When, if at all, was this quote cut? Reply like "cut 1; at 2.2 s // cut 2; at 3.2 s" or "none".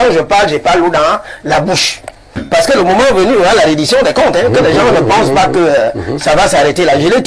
cut 1; at 2.4 s

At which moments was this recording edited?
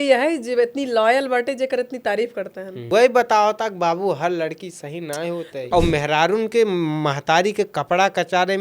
cut 1; at 2.9 s // cut 2; at 5.6 s

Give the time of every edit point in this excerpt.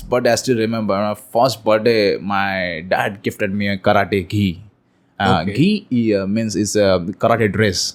none

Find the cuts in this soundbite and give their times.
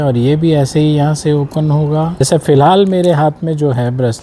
cut 1; at 2.2 s

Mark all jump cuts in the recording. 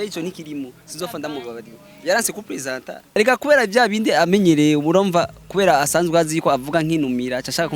cut 1; at 3.1 s

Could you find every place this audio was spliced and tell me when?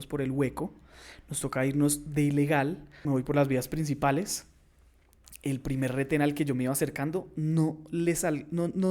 cut 1; at 2.9 s

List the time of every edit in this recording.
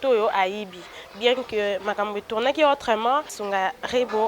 cut 1; at 3.4 s

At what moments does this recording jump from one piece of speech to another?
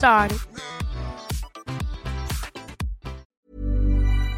cut 1; at 3.3 s

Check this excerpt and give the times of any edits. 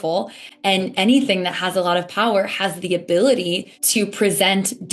cut 1; at 3.7 s

